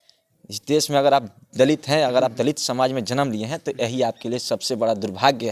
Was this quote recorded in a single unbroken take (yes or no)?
yes